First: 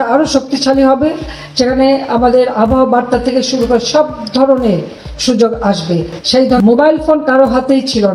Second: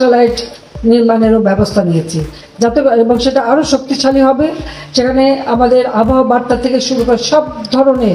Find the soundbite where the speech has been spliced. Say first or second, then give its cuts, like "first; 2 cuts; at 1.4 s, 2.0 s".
first; 1 cut; at 6.6 s